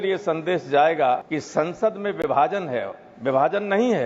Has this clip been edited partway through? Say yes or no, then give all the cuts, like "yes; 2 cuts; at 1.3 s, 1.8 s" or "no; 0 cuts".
yes; 1 cut; at 1.3 s